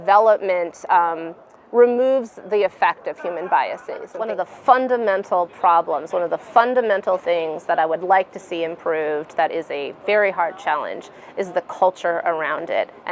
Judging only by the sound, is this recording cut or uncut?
cut